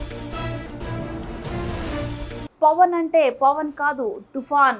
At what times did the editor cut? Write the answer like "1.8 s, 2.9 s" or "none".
2.4 s